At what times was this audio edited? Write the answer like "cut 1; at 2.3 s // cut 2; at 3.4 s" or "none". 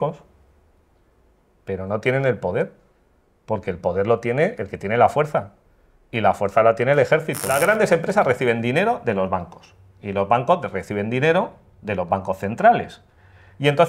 cut 1; at 7.4 s